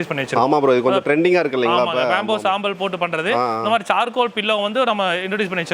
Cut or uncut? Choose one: uncut